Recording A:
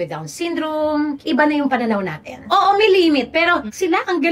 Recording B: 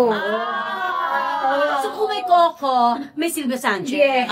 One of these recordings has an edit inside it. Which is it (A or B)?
A